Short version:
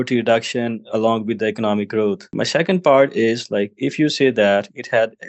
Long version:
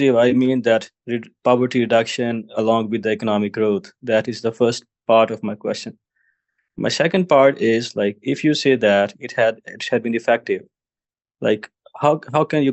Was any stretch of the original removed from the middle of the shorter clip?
yes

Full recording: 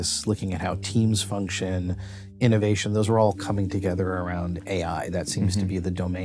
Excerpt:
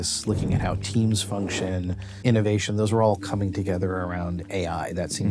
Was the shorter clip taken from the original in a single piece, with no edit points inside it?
no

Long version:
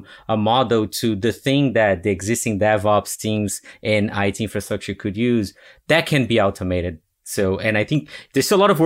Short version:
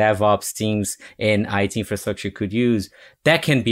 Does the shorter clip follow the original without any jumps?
yes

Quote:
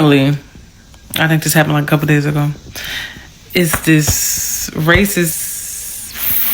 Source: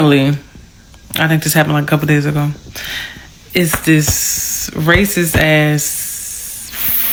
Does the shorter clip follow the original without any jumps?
no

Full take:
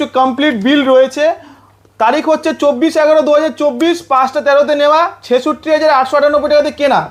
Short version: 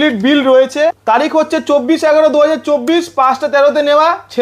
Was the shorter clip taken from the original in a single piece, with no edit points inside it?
no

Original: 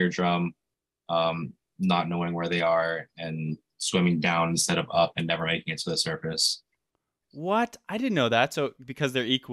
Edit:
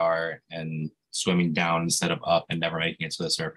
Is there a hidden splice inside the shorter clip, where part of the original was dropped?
no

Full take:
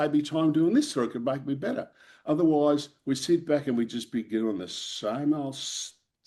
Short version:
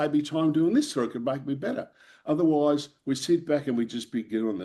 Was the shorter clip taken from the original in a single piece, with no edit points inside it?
yes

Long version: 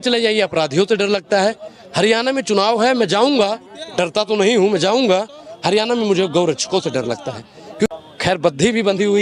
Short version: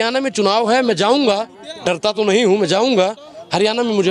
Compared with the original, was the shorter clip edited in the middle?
no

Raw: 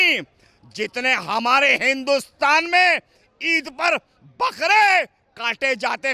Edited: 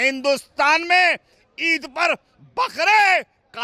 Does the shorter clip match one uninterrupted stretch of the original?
yes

